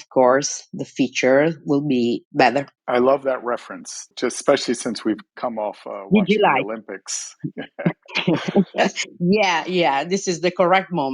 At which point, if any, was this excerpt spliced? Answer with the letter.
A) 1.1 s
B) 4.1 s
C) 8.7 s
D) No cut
B